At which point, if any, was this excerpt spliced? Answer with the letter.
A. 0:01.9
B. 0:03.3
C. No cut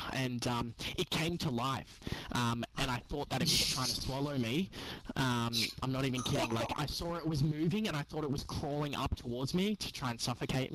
C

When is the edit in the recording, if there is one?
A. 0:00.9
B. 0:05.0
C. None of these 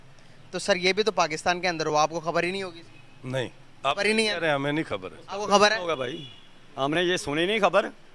A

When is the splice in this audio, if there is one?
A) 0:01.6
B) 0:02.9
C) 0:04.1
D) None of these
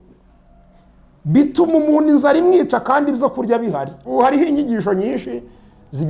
C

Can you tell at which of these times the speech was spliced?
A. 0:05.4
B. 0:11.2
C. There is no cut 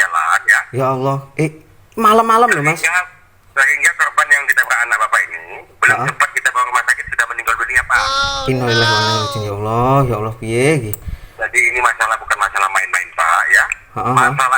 C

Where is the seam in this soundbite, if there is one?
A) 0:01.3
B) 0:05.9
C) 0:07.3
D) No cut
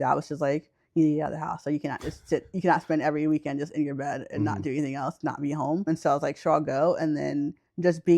B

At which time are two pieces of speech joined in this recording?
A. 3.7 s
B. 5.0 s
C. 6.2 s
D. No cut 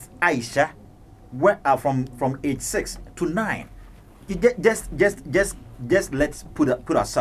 D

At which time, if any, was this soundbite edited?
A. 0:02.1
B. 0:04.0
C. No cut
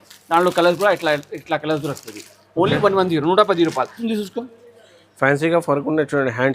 B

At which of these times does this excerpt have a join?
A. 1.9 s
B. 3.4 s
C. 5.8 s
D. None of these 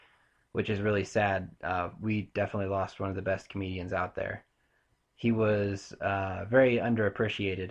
A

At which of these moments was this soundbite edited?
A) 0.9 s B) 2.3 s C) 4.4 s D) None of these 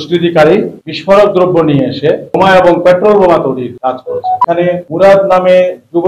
C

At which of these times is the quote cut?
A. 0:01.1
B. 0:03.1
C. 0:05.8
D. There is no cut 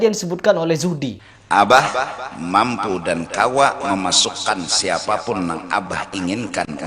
A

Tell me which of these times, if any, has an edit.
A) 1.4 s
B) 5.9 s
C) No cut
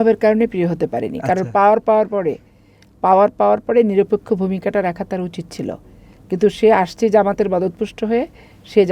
C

